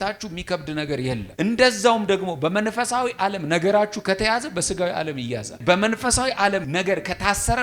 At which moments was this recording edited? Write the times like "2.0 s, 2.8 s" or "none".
5.6 s, 6.7 s

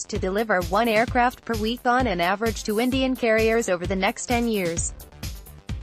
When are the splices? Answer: 4.8 s

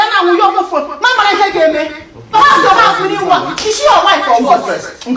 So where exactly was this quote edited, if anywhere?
2.3 s

